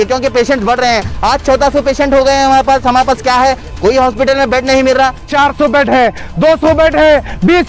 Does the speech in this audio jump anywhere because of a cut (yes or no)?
yes